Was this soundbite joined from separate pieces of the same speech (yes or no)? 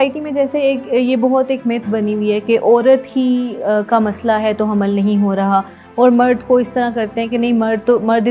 no